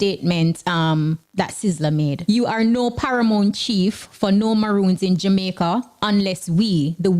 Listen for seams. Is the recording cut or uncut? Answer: cut